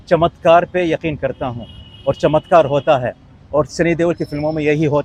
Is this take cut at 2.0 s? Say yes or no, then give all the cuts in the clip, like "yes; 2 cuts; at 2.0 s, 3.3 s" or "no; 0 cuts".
no; 0 cuts